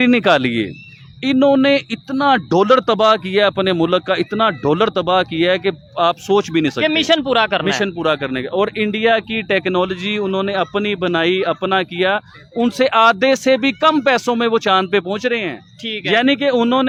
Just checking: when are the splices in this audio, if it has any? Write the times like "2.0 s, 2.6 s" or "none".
none